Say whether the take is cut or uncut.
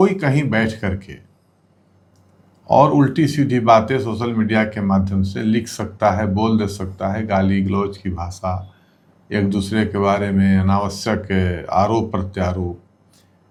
uncut